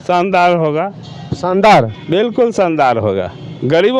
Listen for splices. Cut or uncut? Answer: uncut